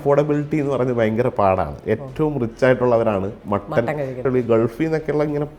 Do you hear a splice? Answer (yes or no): yes